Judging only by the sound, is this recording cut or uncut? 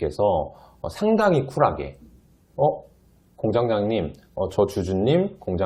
uncut